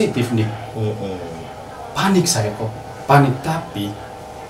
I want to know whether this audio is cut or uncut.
uncut